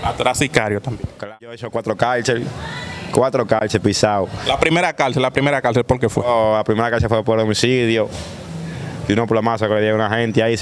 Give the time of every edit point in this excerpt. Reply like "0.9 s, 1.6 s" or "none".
1.4 s